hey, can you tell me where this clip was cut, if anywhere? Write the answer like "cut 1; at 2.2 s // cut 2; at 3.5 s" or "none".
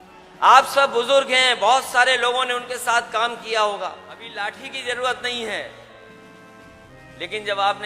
cut 1; at 4.3 s